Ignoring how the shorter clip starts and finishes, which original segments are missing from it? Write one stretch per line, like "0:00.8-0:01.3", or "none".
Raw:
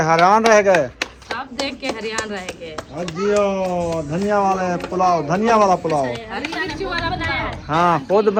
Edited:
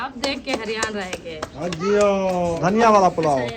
0:03.9-0:05.2